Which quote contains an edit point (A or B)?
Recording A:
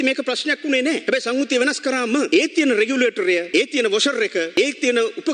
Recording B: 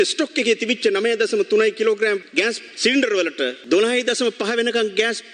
A